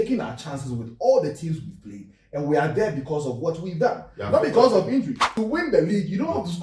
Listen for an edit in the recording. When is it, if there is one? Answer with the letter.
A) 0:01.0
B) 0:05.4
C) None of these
B